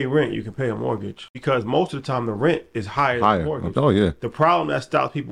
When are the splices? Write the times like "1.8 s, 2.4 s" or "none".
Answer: 1.3 s